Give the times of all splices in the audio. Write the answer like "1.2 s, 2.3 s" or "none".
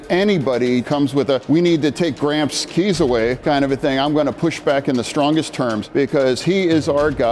1.2 s, 3.4 s, 5.8 s